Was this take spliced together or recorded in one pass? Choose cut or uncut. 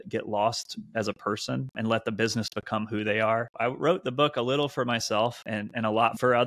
cut